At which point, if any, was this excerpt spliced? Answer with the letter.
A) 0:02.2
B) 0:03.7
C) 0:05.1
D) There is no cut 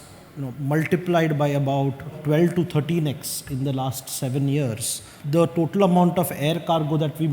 A